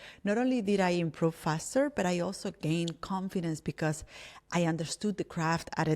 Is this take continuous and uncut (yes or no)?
yes